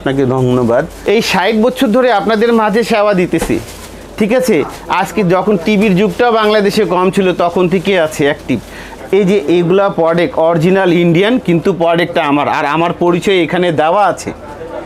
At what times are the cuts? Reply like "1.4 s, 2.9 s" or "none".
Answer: 1.0 s, 8.9 s